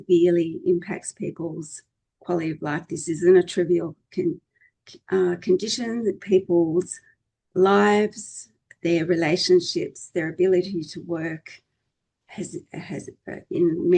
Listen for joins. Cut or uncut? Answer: uncut